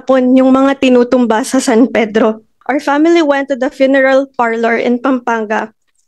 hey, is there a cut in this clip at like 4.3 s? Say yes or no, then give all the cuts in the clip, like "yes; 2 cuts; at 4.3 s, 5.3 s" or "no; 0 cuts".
no; 1 cut; at 2.5 s